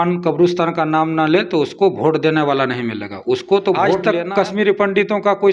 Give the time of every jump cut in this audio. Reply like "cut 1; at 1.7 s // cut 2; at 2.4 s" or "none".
cut 1; at 3.9 s